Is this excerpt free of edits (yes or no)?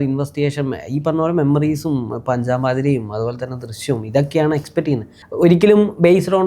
no